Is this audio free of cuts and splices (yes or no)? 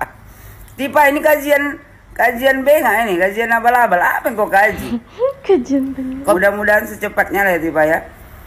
no